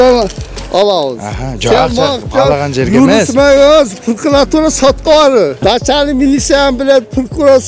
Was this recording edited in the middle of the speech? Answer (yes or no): yes